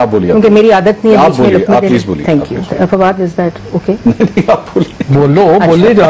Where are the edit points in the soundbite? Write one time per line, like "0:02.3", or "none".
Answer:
none

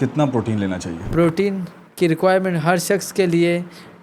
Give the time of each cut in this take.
0:00.9

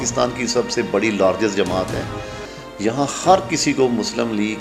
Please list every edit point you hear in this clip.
none

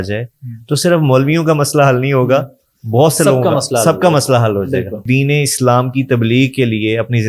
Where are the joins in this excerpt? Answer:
0:05.0

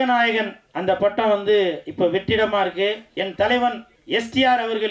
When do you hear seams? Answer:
0:03.1
0:03.9

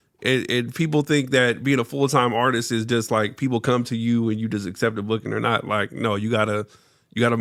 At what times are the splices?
none

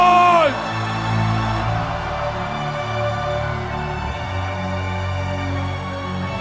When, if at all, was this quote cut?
none

